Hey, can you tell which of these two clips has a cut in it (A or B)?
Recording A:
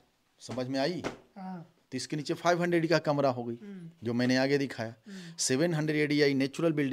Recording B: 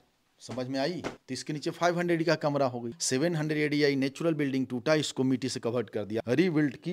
B